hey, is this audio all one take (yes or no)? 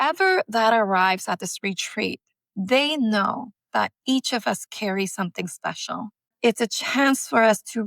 no